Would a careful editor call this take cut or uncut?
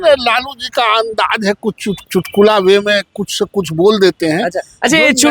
cut